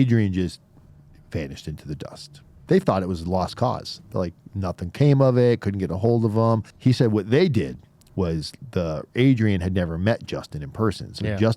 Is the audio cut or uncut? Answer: cut